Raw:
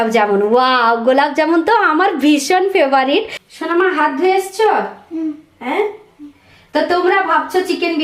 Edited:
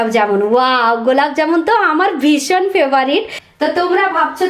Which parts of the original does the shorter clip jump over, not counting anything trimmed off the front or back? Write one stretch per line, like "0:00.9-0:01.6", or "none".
0:03.4-0:06.5